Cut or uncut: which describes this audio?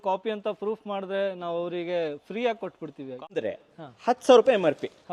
cut